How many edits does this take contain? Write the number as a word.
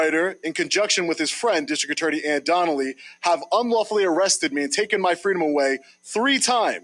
zero